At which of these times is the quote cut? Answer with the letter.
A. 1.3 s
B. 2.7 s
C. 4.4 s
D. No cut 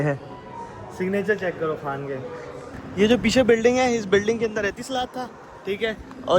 B